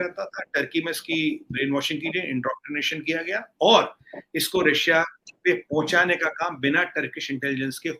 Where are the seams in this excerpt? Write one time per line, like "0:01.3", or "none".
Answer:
none